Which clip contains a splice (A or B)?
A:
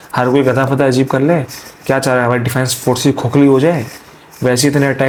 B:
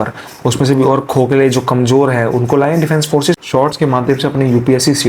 B